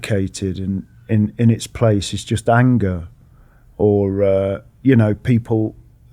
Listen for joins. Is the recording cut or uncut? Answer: uncut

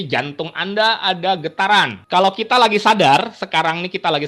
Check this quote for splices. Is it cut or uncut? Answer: cut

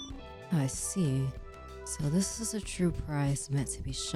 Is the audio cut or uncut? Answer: uncut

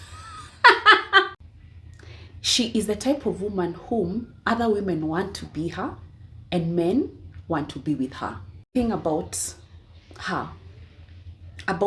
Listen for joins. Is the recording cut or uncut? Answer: cut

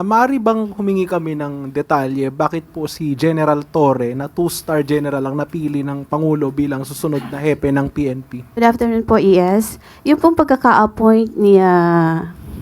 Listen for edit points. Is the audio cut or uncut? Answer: cut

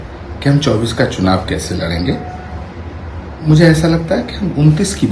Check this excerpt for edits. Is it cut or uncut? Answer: uncut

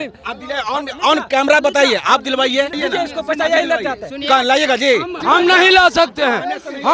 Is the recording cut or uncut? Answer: cut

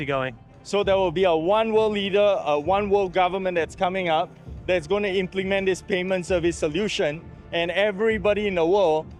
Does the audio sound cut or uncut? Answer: uncut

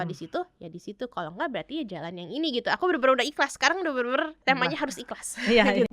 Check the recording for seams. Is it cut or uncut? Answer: cut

